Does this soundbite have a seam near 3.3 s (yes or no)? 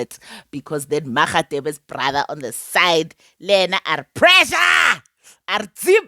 no